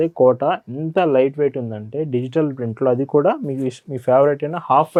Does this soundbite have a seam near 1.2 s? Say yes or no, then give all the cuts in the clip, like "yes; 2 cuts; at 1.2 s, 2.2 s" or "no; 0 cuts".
no; 0 cuts